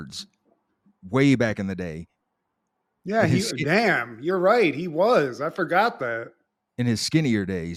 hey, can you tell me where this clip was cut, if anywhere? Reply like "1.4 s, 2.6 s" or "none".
none